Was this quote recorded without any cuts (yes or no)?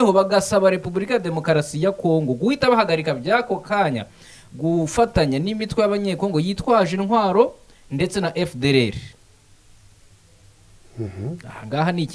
yes